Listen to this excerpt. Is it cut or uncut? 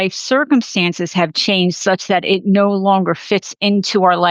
uncut